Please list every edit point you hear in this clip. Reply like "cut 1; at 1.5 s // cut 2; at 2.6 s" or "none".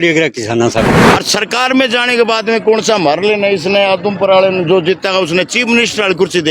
cut 1; at 1.1 s